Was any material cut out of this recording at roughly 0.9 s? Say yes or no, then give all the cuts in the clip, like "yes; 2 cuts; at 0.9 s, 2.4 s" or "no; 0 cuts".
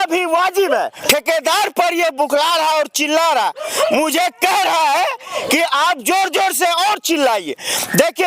yes; 1 cut; at 0.9 s